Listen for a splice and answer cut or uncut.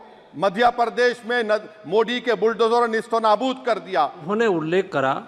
cut